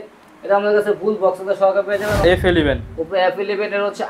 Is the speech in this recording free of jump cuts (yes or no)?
no